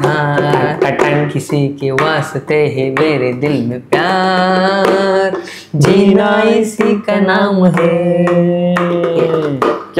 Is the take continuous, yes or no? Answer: yes